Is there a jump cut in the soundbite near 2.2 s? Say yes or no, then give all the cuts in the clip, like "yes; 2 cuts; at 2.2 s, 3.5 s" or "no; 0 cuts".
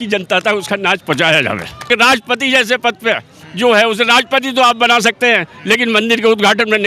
yes; 1 cut; at 2.2 s